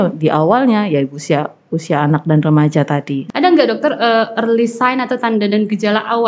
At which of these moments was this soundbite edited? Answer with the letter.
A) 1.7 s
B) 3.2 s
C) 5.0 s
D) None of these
B